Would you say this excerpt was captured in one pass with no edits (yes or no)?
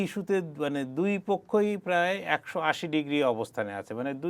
yes